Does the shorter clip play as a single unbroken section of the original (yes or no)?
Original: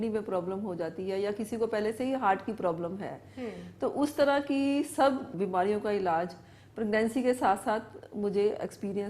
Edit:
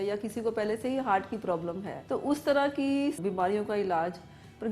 no